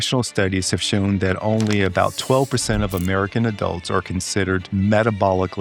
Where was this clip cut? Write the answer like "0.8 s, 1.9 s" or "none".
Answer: 4.7 s